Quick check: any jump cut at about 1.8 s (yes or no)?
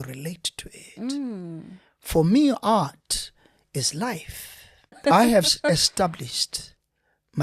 no